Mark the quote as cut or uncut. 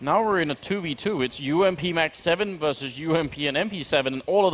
cut